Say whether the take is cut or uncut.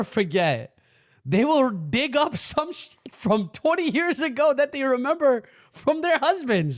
uncut